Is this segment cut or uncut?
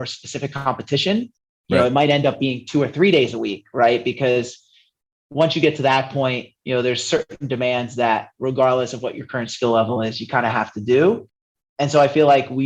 uncut